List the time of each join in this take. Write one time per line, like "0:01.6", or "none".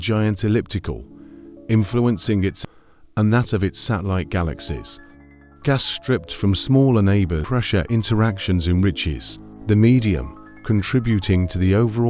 0:02.6
0:07.5

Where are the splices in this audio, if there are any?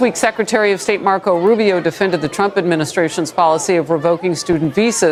none

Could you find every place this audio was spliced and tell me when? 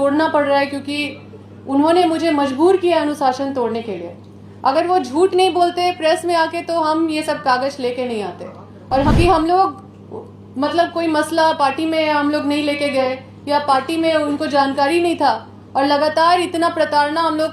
0:09.1

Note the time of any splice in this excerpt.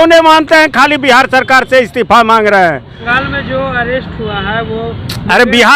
0:03.0

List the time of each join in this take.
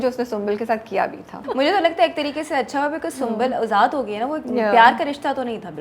0:01.4

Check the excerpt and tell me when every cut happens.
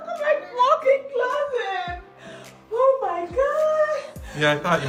none

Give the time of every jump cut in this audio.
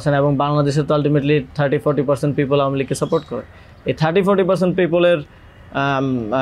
none

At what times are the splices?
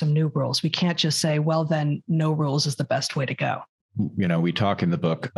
0:03.7

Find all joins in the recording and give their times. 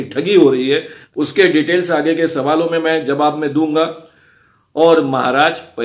0:01.0

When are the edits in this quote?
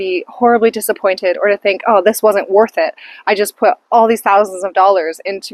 none

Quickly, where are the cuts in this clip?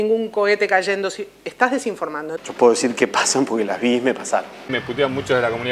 0:02.3
0:04.7

